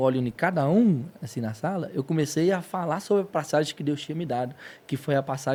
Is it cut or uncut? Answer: uncut